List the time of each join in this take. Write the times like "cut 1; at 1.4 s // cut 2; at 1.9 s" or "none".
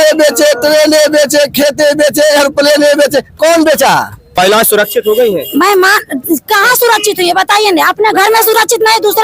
cut 1; at 4.2 s